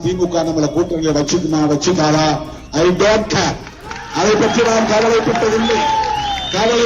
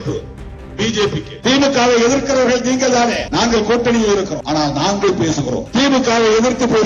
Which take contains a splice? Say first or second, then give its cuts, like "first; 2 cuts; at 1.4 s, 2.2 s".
second; 4 cuts; at 1.3 s, 3.2 s, 4.4 s, 5.6 s